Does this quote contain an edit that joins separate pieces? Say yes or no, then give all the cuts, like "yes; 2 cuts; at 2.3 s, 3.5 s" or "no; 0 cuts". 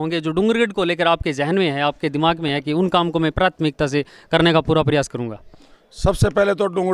no; 0 cuts